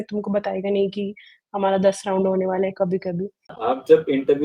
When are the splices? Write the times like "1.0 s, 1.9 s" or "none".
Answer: 3.6 s